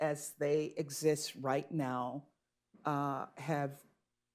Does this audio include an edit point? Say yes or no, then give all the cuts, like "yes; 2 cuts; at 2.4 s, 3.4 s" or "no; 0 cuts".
no; 0 cuts